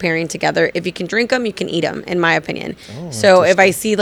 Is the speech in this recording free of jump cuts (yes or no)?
yes